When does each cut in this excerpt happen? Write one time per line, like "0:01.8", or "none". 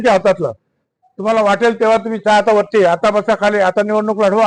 none